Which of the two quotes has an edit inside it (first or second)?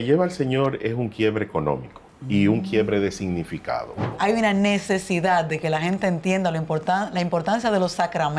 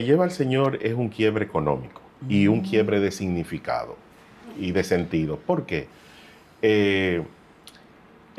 first